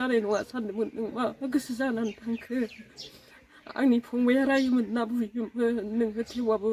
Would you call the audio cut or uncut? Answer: uncut